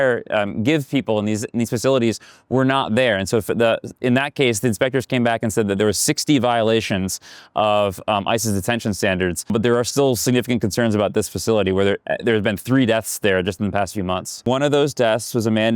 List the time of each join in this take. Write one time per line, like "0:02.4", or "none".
0:09.5
0:14.4